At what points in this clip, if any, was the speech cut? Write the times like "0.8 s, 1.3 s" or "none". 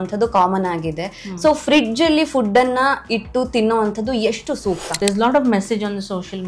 5.0 s